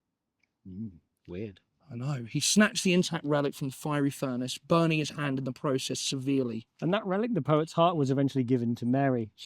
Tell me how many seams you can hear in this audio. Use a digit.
1